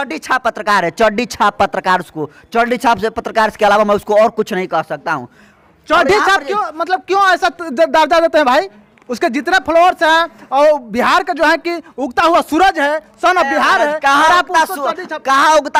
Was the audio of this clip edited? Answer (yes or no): no